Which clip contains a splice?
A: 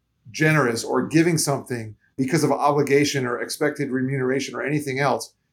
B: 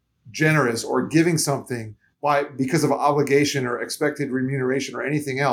A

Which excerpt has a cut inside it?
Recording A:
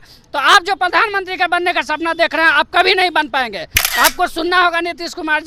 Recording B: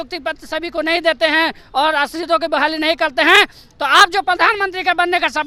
A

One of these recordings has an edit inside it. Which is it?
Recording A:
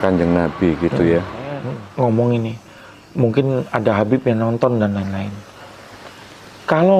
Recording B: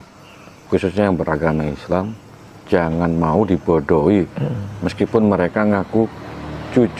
A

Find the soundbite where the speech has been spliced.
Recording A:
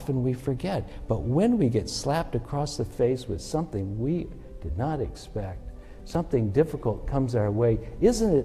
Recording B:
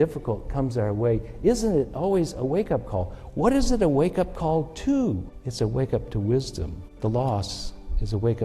B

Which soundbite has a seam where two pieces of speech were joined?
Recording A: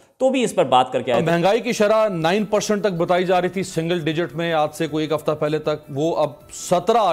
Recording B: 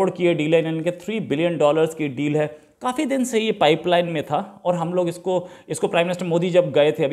A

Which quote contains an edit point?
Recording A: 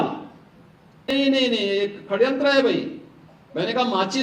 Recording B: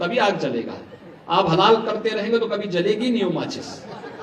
A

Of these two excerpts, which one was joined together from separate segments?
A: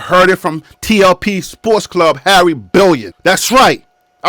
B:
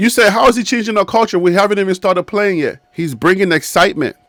A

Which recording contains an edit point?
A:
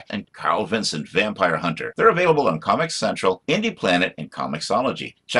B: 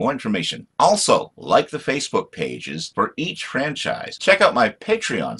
B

